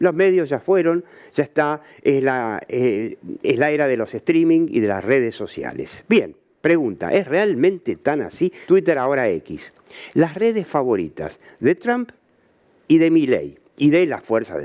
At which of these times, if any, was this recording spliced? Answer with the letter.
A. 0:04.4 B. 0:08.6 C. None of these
B